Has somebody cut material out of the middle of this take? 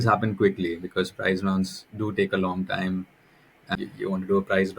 yes; 1 cut; at 3.6 s

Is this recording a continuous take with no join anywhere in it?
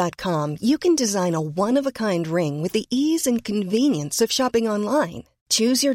yes; 0 cuts

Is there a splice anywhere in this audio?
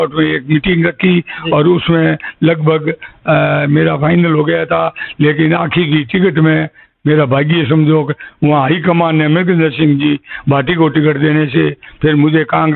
no; 0 cuts

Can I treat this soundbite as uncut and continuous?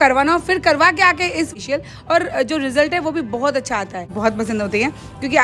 no; 2 cuts; at 1.5 s, 4.1 s

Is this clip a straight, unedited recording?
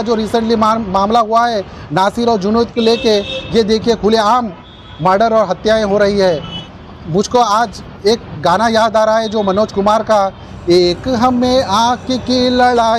no; 2 cuts; at 6.5 s, 10.5 s

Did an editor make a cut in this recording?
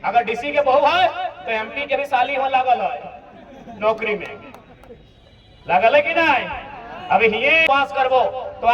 yes; 1 cut; at 7.6 s

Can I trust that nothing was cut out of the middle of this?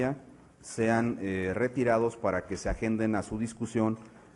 yes; 0 cuts

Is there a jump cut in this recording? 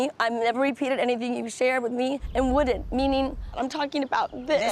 yes; 2 cuts; at 2.2 s, 3.6 s

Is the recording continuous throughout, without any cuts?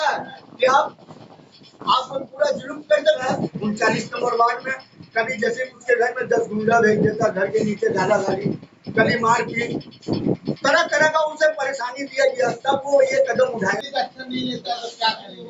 no; 2 cuts; at 3.2 s, 13.8 s

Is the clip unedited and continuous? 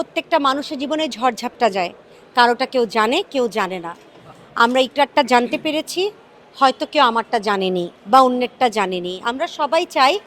yes; 0 cuts

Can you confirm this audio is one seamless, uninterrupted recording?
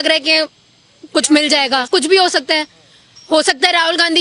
yes; 0 cuts

